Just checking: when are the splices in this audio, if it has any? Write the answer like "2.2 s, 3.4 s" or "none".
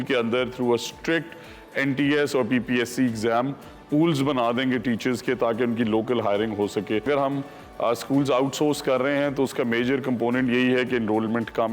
7.1 s